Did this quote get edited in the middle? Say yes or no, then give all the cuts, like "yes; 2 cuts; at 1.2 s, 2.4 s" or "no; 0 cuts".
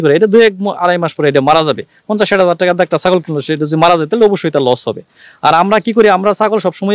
no; 0 cuts